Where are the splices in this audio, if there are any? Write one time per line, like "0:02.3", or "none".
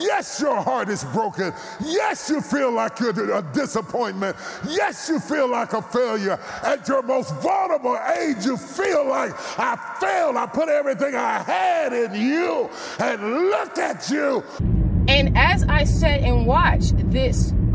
0:14.6